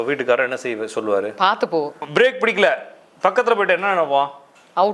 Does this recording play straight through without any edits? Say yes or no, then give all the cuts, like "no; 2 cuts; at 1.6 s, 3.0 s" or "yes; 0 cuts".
no; 1 cut; at 2.0 s